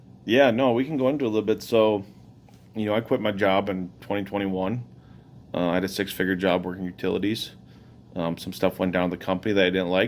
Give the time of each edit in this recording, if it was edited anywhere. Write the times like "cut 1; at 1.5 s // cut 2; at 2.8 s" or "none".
none